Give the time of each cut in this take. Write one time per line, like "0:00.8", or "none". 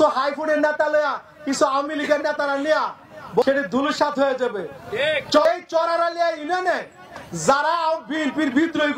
0:03.4
0:05.5